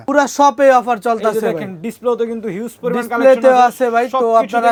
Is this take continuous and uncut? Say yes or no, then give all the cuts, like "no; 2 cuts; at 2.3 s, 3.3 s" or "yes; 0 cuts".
yes; 0 cuts